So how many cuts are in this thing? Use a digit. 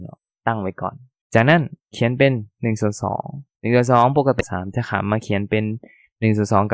1